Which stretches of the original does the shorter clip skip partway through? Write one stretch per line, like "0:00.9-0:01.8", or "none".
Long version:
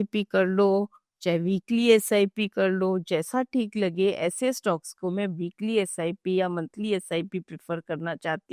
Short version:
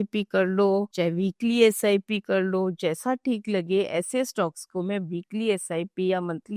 0:00.9-0:01.2